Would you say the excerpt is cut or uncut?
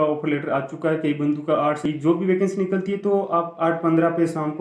cut